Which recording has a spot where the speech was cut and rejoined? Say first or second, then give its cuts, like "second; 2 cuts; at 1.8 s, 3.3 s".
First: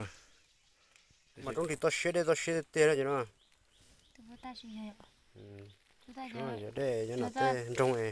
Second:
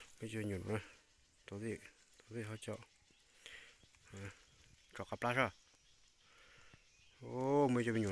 first; 1 cut; at 1.4 s